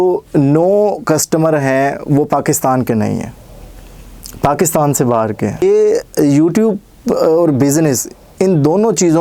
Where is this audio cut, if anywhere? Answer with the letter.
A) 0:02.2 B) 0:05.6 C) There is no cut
B